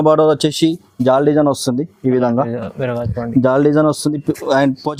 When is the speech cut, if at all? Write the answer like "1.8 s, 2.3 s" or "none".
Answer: none